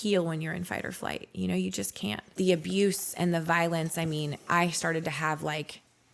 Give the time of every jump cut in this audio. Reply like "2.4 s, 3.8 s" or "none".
2.2 s